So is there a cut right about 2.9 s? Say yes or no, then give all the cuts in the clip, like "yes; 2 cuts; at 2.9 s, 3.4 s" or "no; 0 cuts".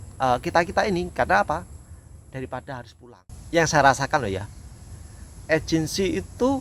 yes; 1 cut; at 2.9 s